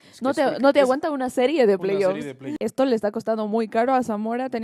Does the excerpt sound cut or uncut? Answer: cut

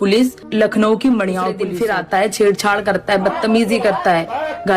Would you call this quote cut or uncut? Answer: cut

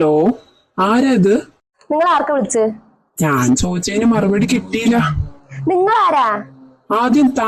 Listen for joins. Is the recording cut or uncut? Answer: uncut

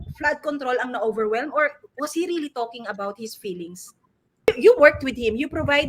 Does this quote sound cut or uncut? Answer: cut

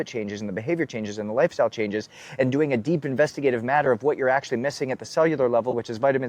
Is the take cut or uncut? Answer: uncut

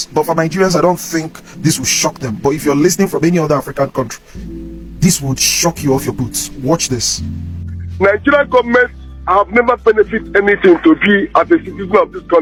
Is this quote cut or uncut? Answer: uncut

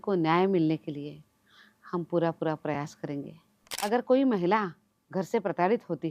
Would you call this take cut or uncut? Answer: cut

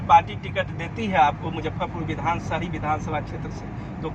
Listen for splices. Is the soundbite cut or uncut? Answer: uncut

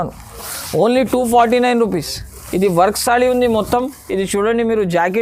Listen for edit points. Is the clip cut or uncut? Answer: uncut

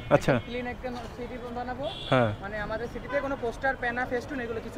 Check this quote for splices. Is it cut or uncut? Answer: uncut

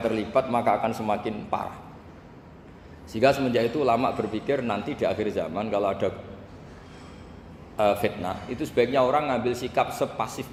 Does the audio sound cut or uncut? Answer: uncut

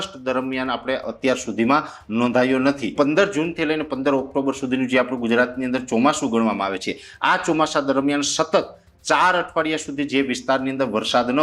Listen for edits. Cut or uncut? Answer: cut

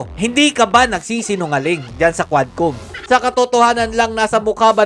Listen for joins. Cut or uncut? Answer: cut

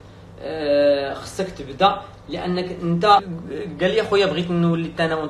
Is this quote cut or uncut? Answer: cut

